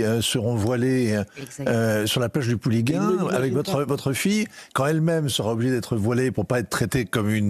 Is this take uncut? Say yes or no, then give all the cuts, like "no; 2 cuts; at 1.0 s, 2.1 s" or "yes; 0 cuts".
yes; 0 cuts